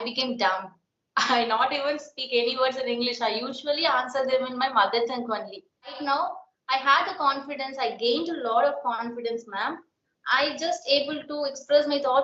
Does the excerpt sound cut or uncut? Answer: cut